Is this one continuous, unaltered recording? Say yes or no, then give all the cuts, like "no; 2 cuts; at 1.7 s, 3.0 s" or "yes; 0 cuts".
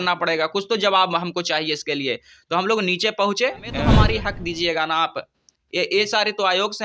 no; 1 cut; at 3.9 s